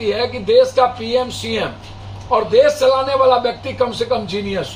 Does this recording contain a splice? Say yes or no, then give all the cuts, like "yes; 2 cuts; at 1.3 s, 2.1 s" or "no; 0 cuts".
no; 0 cuts